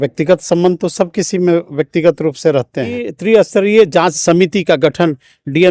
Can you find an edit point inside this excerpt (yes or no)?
yes